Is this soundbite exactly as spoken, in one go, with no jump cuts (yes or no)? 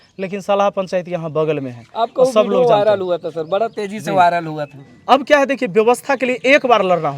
yes